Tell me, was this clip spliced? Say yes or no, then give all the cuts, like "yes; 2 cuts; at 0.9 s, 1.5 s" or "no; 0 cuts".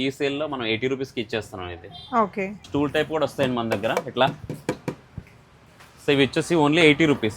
yes; 1 cut; at 2.7 s